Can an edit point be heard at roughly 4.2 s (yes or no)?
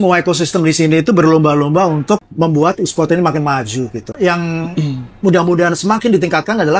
yes